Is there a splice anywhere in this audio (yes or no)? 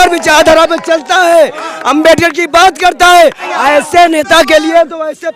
yes